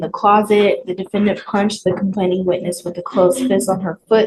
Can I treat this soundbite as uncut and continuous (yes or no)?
yes